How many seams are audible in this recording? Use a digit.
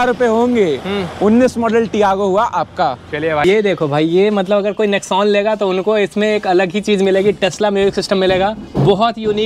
1